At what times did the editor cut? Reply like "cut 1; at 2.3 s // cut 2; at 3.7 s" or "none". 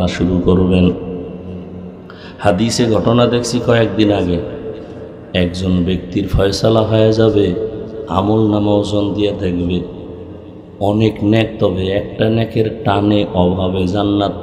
none